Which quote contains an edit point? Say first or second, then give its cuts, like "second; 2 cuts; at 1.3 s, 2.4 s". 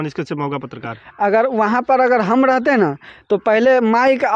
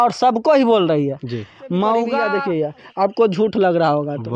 second; 1 cut; at 2.3 s